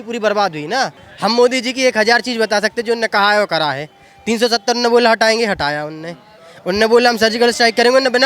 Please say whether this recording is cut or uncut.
cut